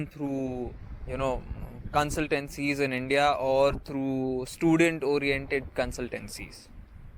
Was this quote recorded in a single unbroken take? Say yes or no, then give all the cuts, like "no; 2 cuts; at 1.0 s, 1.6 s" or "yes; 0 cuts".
yes; 0 cuts